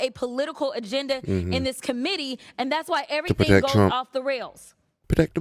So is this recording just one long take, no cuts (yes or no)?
yes